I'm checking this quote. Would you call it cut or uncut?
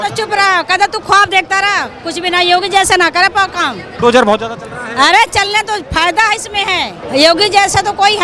cut